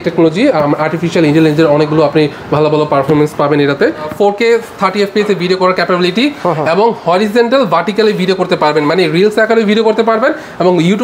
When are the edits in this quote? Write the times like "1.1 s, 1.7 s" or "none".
4.1 s